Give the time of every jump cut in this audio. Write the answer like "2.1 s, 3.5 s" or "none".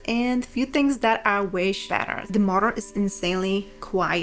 2.2 s